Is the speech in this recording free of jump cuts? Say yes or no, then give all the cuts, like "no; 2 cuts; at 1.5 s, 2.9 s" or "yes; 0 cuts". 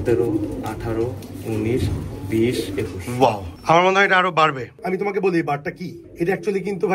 no; 1 cut; at 4.7 s